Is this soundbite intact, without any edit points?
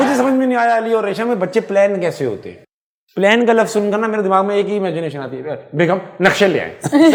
yes; 0 cuts

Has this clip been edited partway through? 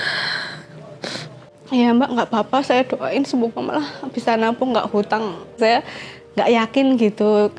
yes; 1 cut; at 5.6 s

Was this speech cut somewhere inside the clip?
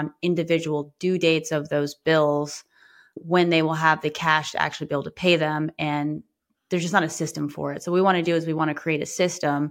no; 0 cuts

